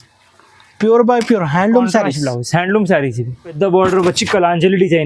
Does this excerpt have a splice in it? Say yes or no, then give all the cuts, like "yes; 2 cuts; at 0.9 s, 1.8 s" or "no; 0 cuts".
yes; 1 cut; at 3.5 s